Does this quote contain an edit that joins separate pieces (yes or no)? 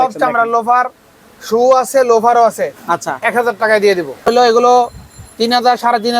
yes